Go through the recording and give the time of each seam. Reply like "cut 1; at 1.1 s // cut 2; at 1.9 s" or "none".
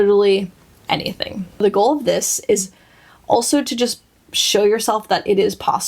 cut 1; at 1.6 s